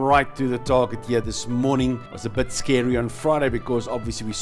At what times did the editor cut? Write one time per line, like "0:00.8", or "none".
0:02.1